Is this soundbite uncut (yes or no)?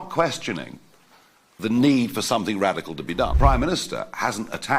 no